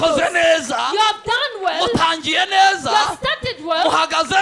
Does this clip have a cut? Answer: no; 0 cuts

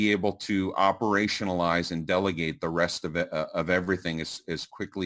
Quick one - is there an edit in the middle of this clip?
no; 0 cuts

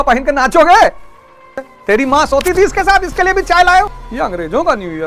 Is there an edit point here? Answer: yes; 2 cuts; at 1.7 s, 4.0 s

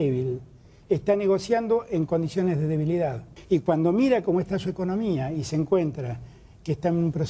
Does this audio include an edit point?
yes; 1 cut; at 3.3 s

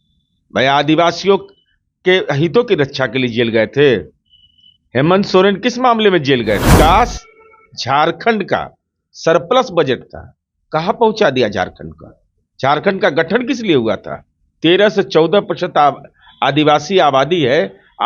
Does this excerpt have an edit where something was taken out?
yes; 1 cut; at 6.7 s

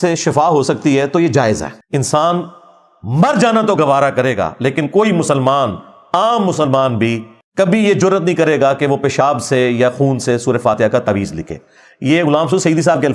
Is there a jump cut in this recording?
yes; 1 cut; at 1.8 s

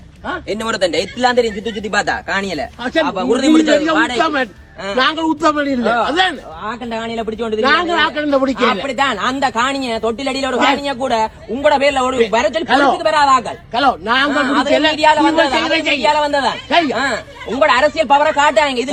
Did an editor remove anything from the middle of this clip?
no; 0 cuts

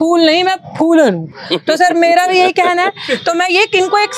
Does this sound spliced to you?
no; 0 cuts

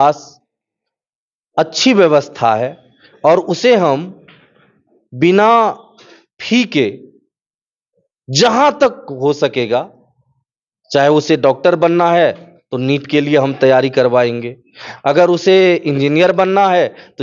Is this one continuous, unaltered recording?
yes; 0 cuts

